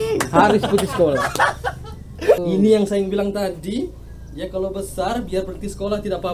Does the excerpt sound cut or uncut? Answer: cut